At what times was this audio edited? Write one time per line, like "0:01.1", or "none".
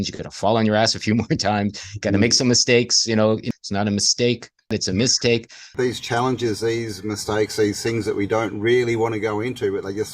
0:03.4
0:04.7
0:05.6